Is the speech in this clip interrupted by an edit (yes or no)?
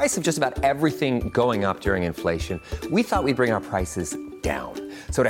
no